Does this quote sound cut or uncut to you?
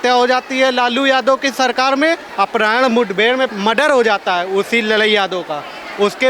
cut